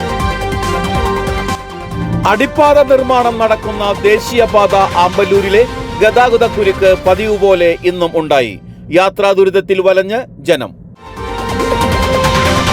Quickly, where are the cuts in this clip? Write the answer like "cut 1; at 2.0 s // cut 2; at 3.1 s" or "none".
cut 1; at 1.8 s